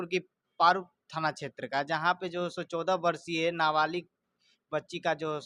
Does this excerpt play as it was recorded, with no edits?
yes; 0 cuts

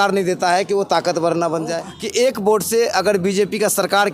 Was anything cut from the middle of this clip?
yes; 1 cut; at 1.9 s

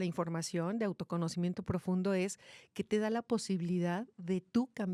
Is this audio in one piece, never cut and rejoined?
yes; 0 cuts

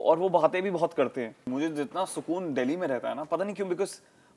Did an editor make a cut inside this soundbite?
yes; 1 cut; at 1.4 s

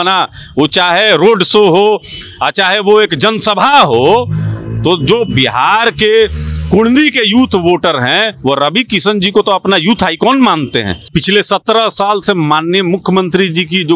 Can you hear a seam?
yes; 1 cut; at 11.0 s

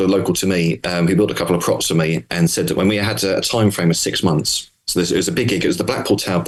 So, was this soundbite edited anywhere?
no; 0 cuts

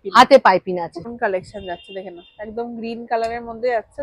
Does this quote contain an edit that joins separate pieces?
yes; 1 cut; at 1.1 s

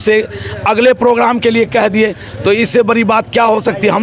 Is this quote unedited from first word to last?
yes; 0 cuts

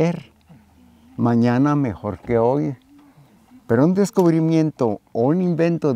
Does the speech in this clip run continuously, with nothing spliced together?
yes; 0 cuts

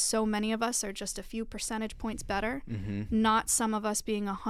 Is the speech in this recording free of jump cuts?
yes; 0 cuts

